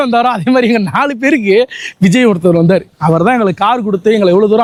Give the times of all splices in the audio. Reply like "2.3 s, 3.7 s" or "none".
none